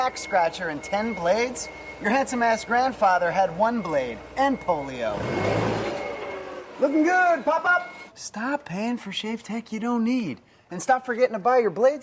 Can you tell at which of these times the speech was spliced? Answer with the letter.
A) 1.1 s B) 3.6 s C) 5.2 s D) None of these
D